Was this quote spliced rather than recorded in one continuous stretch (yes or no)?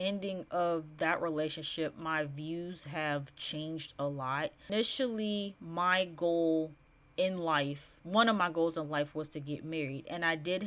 yes